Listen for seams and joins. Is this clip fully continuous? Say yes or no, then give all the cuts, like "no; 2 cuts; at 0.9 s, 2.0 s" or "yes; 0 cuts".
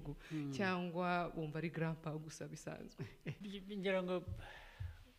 no; 1 cut; at 3.4 s